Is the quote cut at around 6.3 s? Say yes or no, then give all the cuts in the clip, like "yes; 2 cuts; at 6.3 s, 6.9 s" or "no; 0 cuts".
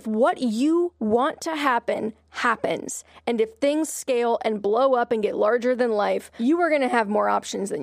yes; 1 cut; at 6.3 s